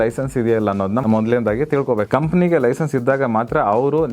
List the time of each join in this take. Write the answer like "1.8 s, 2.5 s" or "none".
1.0 s, 2.1 s

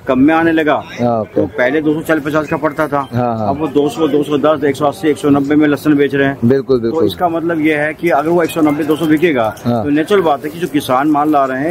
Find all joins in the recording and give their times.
none

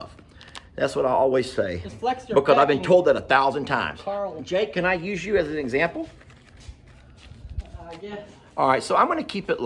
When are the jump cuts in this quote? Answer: 4.4 s

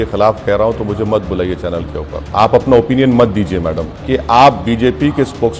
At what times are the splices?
2.3 s, 3.9 s

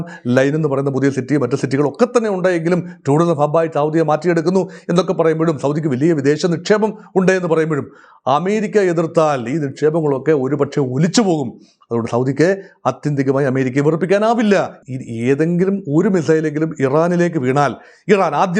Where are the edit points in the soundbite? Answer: 14.7 s

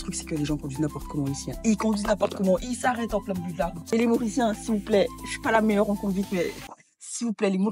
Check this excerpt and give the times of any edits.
none

